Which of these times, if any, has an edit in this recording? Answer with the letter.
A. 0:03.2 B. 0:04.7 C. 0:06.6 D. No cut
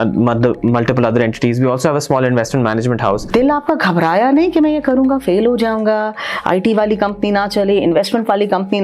A